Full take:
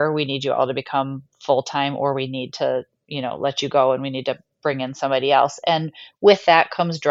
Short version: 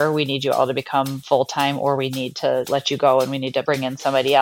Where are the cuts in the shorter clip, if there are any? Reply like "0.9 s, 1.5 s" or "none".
1.2 s, 2.7 s, 3.6 s